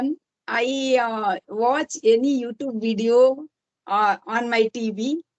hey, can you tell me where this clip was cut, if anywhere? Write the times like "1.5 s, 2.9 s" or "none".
none